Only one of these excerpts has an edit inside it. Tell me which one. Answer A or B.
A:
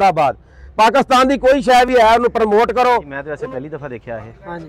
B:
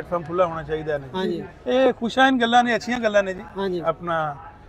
A